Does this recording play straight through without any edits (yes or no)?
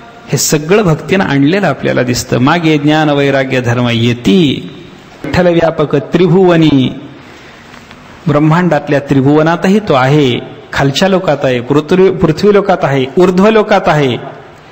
no